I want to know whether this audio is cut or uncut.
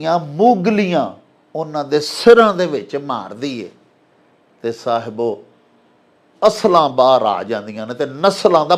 uncut